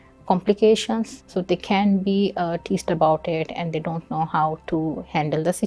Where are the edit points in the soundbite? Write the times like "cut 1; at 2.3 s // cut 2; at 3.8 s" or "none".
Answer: cut 1; at 1.2 s